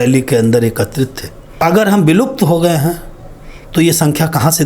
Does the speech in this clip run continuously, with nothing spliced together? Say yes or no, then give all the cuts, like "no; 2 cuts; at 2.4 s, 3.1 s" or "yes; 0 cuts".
no; 1 cut; at 1.6 s